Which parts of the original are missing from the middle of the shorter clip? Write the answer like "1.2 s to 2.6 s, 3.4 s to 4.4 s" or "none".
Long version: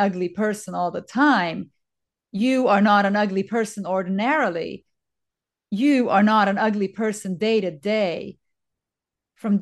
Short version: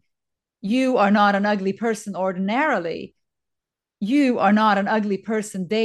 none

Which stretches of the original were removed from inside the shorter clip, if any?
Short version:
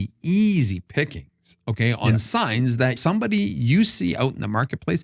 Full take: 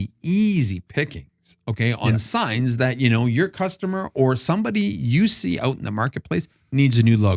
2.9 s to 4.4 s

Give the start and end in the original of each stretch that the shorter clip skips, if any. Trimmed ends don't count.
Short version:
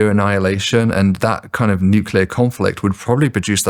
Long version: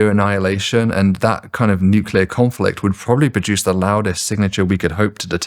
none

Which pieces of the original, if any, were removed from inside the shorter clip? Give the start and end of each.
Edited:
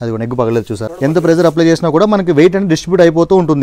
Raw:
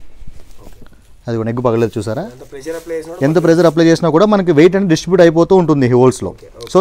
2.2 s to 3.1 s

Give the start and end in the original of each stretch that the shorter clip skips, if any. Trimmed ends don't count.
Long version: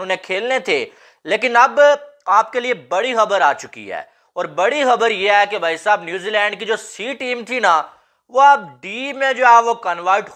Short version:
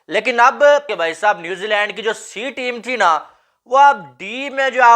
2.1 s to 5.5 s

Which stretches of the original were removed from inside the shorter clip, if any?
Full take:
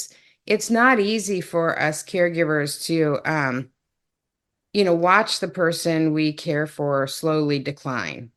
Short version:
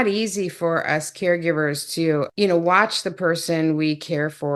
3.2 s to 4.7 s

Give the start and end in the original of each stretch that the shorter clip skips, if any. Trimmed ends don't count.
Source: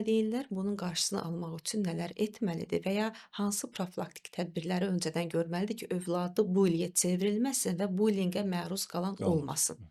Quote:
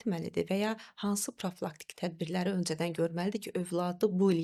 none

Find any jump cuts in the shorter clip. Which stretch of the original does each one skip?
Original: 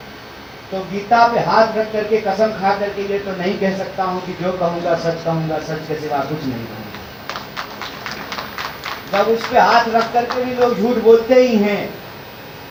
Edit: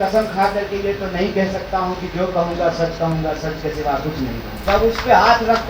6.8 s to 9.0 s

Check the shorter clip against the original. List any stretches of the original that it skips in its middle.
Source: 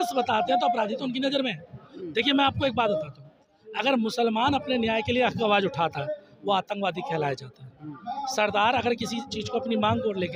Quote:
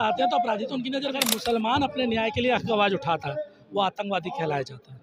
1.5 s to 3.9 s

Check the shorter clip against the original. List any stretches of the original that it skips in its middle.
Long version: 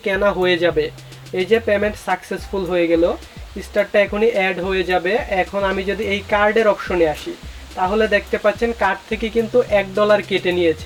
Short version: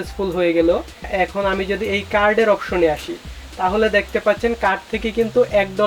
3.4 s to 5.3 s

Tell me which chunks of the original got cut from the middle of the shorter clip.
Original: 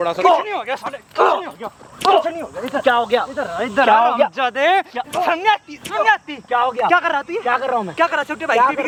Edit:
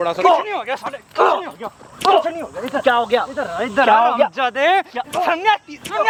none

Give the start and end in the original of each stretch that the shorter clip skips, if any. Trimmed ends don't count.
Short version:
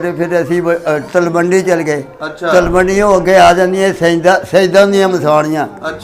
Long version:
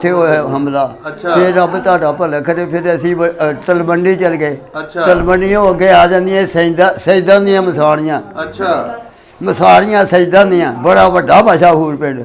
none

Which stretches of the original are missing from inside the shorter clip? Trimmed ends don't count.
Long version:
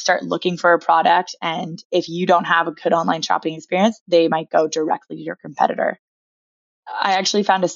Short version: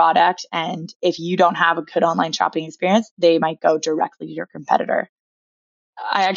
none

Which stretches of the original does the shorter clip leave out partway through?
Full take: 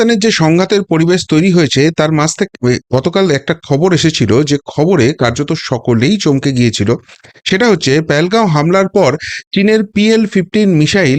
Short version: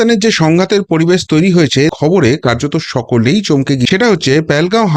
1.9 s to 4.7 s, 6.6 s to 7.5 s

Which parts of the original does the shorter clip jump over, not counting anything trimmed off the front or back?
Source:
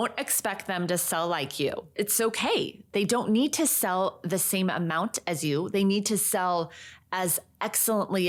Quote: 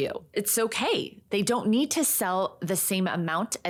none

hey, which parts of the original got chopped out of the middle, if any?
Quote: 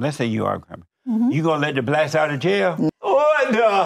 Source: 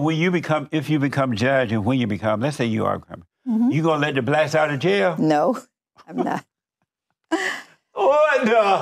5.3 s to 7.8 s

